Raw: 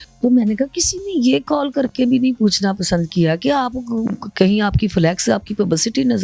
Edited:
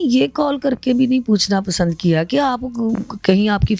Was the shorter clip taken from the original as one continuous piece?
yes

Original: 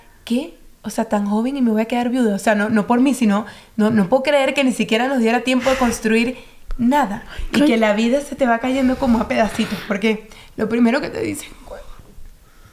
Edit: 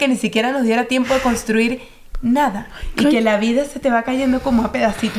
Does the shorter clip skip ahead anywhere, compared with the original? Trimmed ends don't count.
no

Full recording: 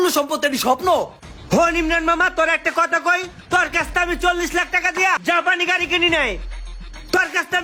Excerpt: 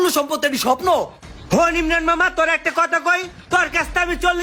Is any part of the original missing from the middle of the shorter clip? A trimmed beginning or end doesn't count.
no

